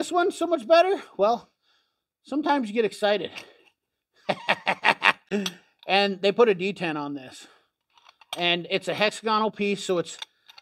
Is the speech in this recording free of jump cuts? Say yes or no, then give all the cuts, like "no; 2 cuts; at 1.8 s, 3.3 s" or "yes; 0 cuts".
yes; 0 cuts